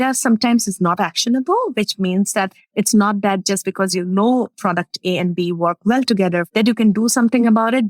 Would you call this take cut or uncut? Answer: cut